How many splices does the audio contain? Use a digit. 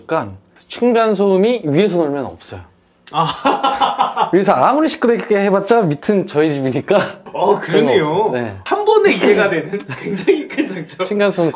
0